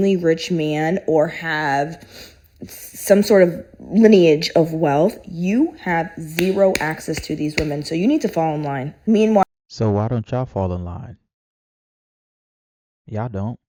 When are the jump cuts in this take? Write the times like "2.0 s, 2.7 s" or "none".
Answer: none